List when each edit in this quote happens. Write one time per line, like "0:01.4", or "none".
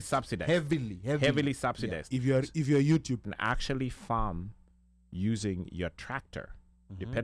0:03.2